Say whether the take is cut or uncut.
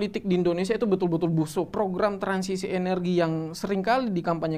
cut